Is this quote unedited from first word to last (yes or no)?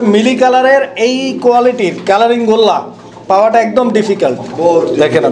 yes